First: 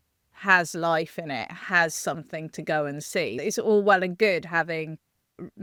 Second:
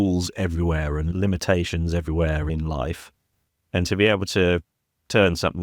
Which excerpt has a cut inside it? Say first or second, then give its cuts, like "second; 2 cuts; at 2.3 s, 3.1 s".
second; 2 cuts; at 1.1 s, 2.5 s